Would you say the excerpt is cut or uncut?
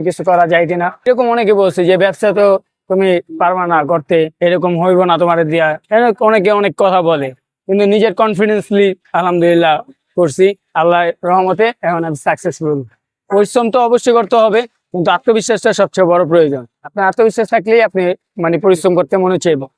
uncut